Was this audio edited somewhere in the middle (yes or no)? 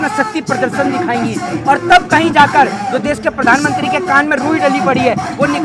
no